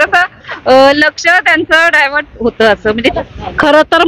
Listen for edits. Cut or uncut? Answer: cut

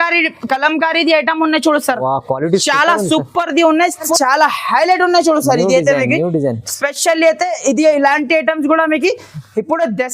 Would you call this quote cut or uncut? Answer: cut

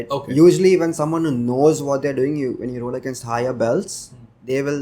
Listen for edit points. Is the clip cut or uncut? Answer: uncut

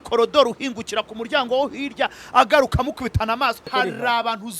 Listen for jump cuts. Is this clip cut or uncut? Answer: cut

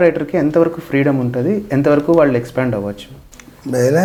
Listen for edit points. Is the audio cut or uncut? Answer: uncut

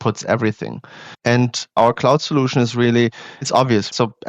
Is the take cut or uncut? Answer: cut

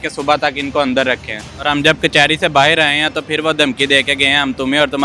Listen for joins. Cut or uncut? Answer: cut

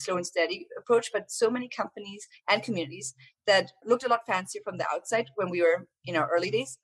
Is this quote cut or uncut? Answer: cut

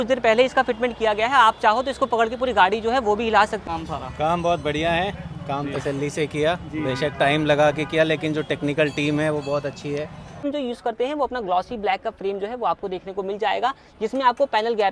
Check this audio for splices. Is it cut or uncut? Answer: cut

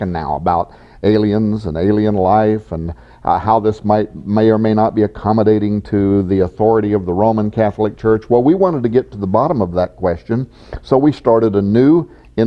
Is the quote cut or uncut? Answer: uncut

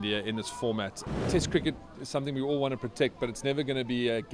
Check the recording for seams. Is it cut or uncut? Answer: cut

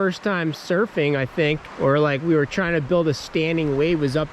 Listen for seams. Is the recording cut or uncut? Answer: cut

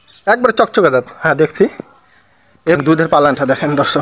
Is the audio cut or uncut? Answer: cut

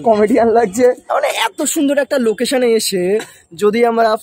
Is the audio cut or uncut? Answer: cut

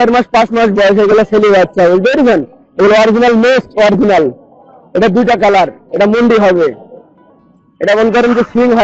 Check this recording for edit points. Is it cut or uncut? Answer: uncut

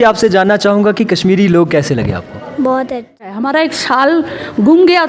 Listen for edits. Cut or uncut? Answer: cut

